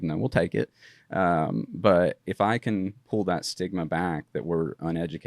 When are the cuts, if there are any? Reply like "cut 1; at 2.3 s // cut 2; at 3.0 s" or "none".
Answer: cut 1; at 2.2 s

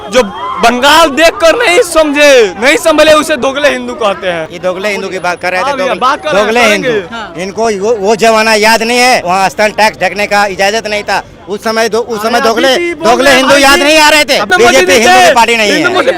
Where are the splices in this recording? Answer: cut 1; at 4.5 s // cut 2; at 9.2 s // cut 3; at 14.5 s

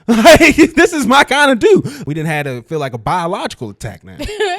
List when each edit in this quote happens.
cut 1; at 1.9 s

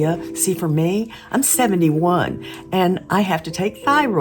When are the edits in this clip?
none

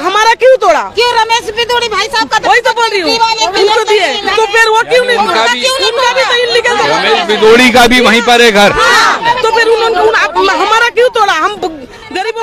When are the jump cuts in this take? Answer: none

